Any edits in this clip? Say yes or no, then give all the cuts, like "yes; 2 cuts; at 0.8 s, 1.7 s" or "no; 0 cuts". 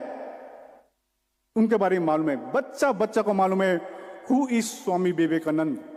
no; 0 cuts